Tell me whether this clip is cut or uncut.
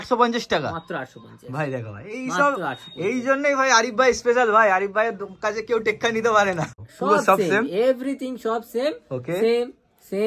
cut